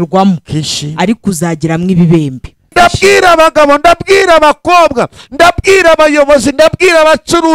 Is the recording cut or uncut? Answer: cut